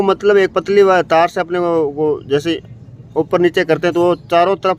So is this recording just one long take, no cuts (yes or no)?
yes